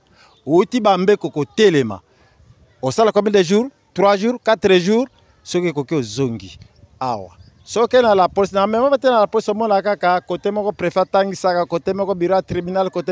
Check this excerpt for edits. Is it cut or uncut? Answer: uncut